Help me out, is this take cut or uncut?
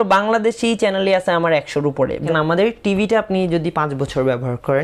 cut